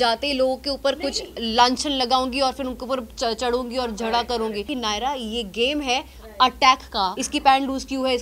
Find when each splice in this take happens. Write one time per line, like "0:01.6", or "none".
0:04.7
0:07.2